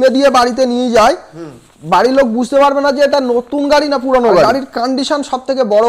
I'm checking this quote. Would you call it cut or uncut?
cut